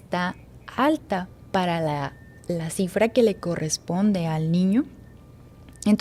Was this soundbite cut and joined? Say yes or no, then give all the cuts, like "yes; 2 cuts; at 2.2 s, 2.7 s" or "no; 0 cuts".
no; 0 cuts